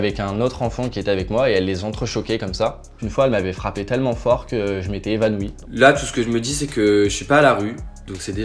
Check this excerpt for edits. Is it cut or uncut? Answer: cut